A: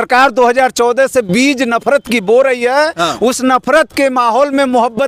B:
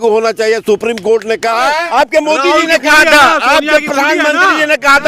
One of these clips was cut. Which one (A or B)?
B